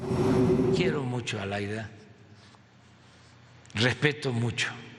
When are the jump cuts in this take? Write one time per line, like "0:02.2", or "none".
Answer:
0:00.9